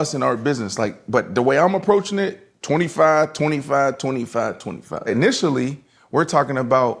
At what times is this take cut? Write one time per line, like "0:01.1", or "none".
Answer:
0:05.1